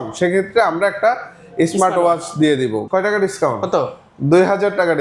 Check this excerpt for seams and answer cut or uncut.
cut